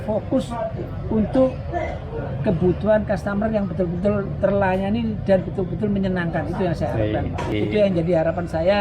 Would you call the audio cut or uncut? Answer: cut